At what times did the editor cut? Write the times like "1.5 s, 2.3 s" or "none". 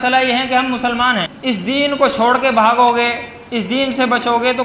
1.3 s